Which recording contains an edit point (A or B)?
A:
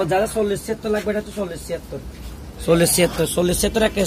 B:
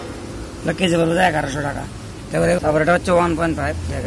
B